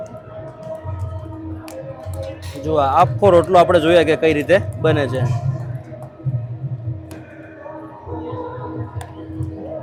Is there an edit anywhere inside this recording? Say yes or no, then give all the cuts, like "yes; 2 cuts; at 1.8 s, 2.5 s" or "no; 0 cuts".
no; 0 cuts